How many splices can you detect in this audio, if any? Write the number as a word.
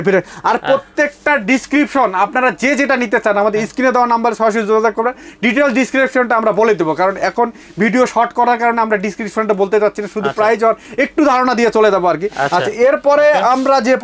zero